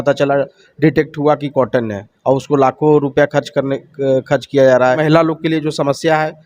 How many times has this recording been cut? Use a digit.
1